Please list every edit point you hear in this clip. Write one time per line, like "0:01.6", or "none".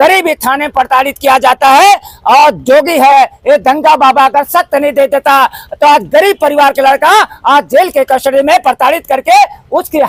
none